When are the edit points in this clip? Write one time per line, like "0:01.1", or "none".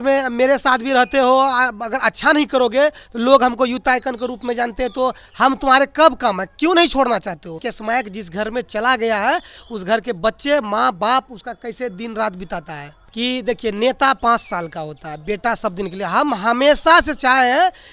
0:07.7
0:13.0